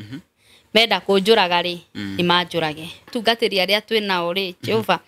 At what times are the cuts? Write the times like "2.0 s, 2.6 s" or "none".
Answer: 3.1 s